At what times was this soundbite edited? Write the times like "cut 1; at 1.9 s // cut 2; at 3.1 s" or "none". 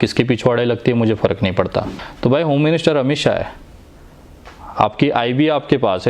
cut 1; at 2.0 s